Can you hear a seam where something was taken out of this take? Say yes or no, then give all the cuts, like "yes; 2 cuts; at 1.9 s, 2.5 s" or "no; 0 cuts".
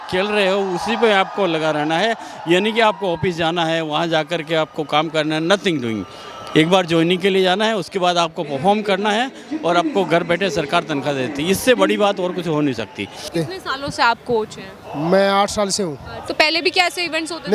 yes; 2 cuts; at 13.3 s, 16.2 s